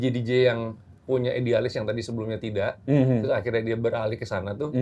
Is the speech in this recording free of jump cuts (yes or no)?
yes